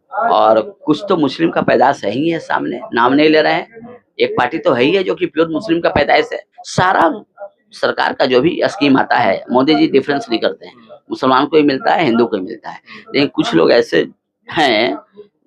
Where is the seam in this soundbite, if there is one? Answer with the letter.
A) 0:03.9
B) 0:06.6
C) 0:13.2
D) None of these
B